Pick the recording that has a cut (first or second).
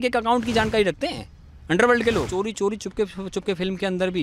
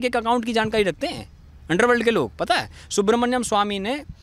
first